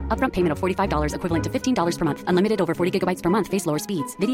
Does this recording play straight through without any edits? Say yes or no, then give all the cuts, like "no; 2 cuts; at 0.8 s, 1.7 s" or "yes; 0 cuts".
yes; 0 cuts